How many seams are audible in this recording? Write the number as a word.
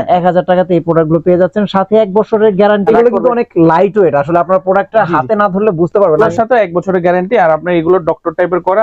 two